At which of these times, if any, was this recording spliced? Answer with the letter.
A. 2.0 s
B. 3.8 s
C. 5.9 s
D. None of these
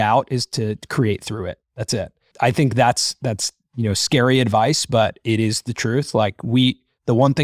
A